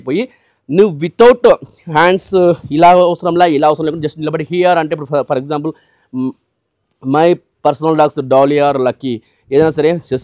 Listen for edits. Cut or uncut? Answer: uncut